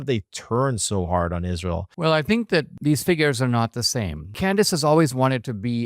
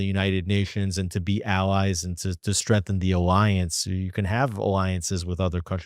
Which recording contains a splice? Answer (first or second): first